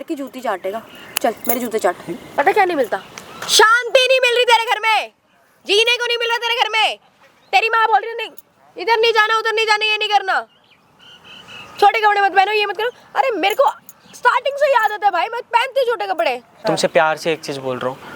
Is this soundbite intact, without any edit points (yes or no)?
no